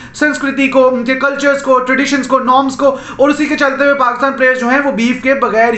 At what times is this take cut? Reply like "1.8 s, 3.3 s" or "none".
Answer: none